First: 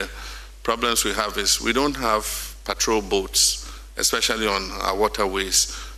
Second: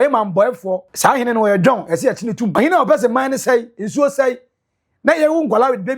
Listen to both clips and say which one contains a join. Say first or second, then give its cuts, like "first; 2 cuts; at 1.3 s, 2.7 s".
second; 2 cuts; at 0.9 s, 2.6 s